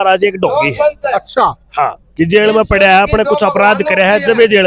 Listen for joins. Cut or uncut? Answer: uncut